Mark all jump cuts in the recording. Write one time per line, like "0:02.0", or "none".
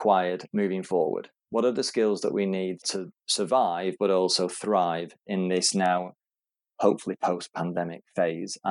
0:02.8